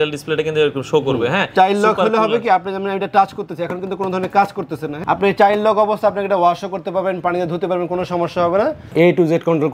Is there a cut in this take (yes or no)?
yes